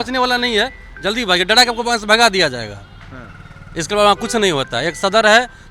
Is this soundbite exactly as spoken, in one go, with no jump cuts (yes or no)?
yes